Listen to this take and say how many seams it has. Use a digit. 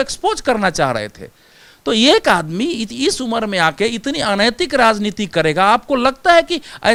0